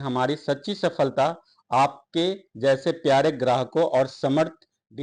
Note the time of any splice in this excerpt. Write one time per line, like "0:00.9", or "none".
none